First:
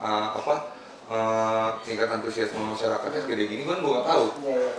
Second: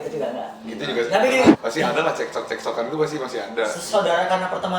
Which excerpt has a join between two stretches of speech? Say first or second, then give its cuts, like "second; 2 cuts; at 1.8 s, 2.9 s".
second; 1 cut; at 1.5 s